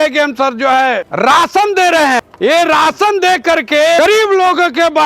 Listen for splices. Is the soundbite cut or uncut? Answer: cut